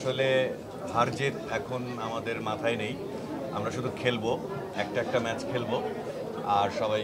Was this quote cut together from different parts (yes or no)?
no